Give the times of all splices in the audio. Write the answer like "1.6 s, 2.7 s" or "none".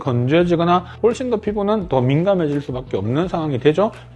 0.9 s